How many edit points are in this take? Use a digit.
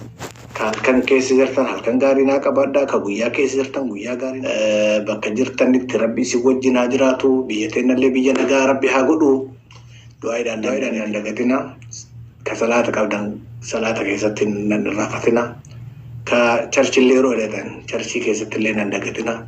2